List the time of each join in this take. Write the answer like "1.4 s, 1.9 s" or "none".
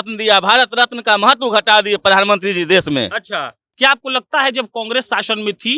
3.6 s